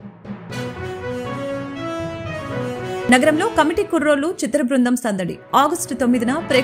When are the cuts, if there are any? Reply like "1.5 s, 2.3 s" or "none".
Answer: none